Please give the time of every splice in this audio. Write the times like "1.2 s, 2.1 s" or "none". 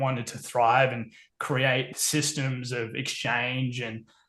1.9 s